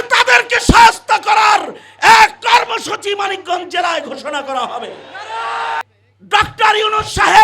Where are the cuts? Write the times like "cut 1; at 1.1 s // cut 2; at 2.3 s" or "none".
cut 1; at 5.8 s